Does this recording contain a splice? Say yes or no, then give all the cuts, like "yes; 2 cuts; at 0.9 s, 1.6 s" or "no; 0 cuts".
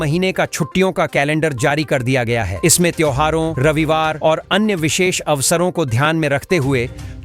no; 0 cuts